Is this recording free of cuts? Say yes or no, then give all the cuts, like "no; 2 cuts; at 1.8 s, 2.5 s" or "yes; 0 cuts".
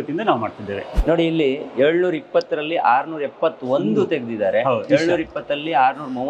no; 1 cut; at 0.9 s